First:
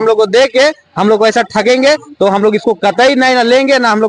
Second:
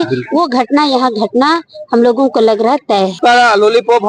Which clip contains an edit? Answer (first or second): second